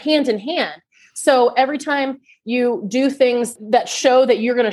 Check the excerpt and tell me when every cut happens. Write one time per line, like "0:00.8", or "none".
0:03.5